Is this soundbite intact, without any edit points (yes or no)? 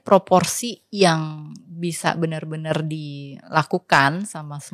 yes